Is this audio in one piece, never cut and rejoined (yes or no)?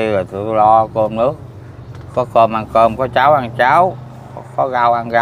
yes